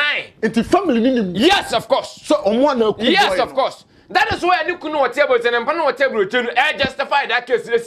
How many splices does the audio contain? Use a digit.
0